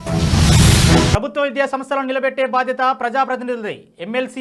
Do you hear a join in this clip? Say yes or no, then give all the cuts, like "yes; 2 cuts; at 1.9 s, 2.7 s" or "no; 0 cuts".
yes; 1 cut; at 1.1 s